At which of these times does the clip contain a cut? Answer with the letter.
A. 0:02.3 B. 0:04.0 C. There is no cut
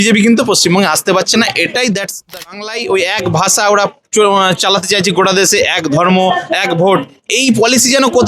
A